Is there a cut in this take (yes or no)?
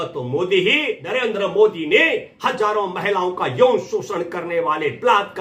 yes